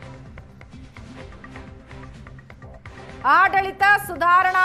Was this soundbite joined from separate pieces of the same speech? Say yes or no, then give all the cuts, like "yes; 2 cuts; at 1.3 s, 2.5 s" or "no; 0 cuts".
yes; 1 cut; at 3.2 s